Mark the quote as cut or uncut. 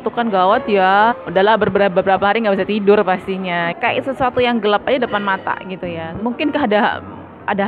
cut